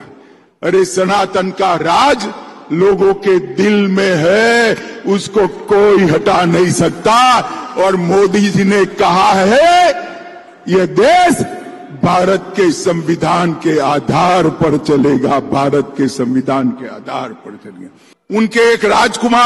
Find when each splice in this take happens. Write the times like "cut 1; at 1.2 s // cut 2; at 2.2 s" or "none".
none